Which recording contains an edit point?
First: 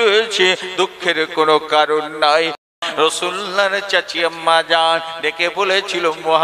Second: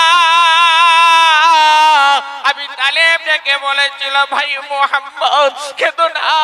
first; 1 cut; at 2.8 s

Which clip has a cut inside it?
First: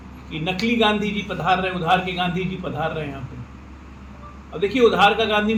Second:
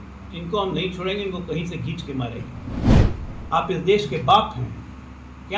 second; 1 cut; at 3.1 s

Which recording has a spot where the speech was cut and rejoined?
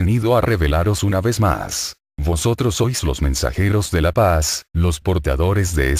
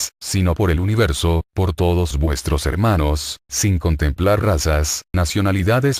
second; 1 cut; at 2.8 s

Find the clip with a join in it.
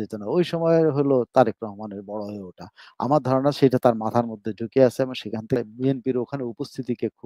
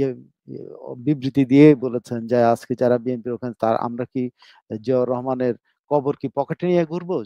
first; 1 cut; at 5.6 s

